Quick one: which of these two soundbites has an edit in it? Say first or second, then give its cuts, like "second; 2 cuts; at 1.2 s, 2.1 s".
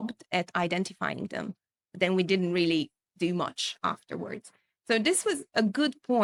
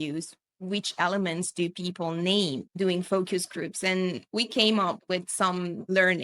second; 2 cuts; at 4.2 s, 5.5 s